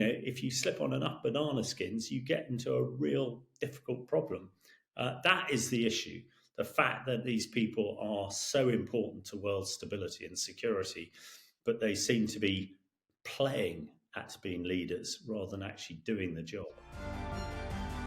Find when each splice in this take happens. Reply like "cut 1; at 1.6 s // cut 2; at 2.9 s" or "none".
cut 1; at 16.8 s

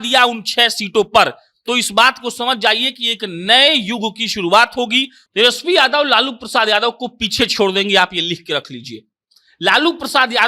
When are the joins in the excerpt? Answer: cut 1; at 5.2 s

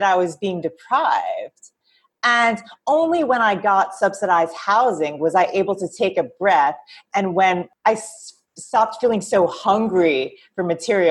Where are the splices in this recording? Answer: cut 1; at 7.7 s

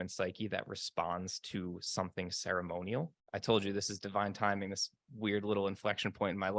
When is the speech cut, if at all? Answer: cut 1; at 3.2 s

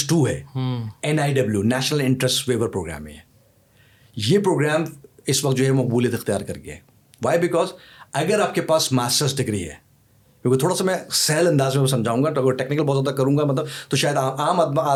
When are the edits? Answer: none

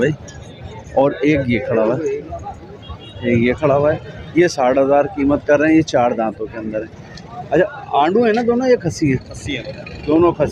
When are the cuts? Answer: none

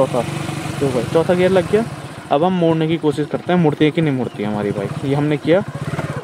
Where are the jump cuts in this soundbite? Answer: none

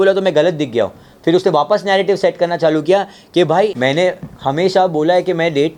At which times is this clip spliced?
cut 1; at 3.7 s

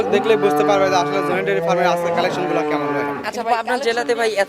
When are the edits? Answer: cut 1; at 3.3 s

